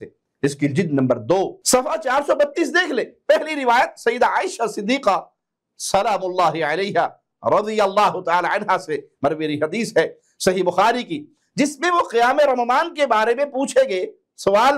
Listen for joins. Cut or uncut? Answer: uncut